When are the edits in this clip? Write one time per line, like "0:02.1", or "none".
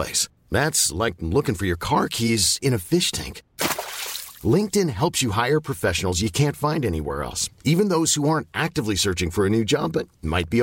none